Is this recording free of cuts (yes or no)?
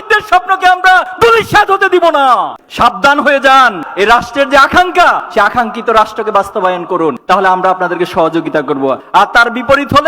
no